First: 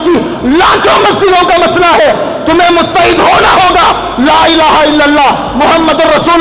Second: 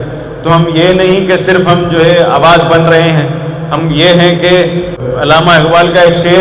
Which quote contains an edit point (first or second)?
second